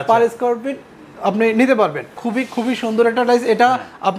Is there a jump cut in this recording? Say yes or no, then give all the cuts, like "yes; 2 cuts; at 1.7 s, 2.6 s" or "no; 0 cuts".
yes; 1 cut; at 2.2 s